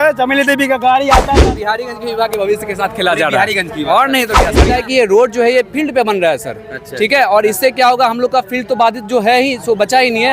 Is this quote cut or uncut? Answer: cut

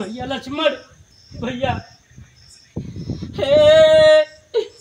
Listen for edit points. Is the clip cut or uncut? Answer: uncut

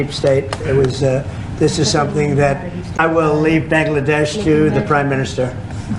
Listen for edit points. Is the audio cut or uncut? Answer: cut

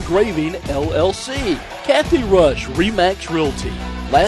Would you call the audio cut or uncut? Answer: cut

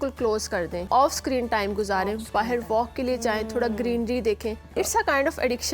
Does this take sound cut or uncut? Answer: cut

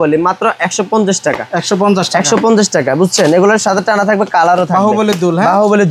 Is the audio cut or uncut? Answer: uncut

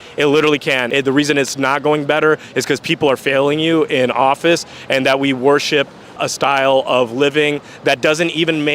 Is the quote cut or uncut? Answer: cut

